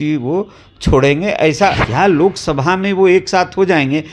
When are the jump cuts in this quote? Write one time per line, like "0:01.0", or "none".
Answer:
0:01.8